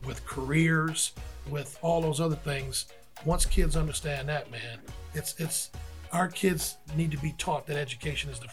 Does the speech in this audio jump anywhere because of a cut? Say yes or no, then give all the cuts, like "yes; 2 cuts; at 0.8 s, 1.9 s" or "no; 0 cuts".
no; 0 cuts